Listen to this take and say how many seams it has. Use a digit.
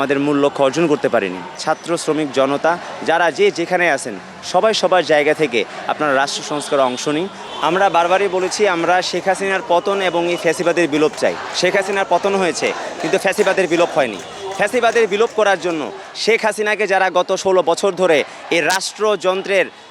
2